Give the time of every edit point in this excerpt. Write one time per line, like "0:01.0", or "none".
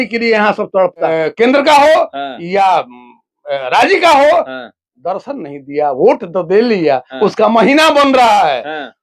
0:01.1